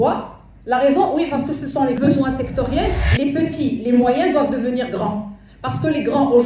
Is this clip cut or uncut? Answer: cut